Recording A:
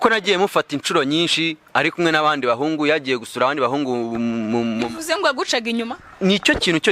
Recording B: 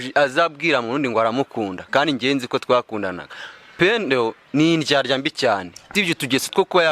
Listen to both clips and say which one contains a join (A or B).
B